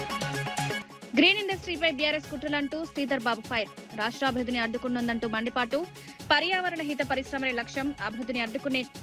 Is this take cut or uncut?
cut